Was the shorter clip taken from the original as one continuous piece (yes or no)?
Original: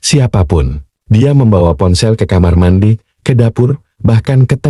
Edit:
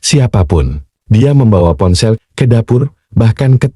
no